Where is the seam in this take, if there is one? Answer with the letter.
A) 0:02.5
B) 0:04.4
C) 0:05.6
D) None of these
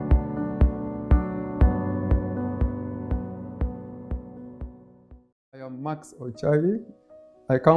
C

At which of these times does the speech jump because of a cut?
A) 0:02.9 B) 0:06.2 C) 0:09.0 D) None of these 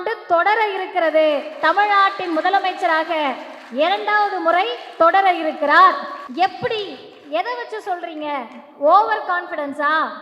B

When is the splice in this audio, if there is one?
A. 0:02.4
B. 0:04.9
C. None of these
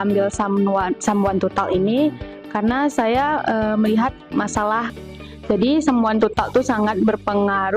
B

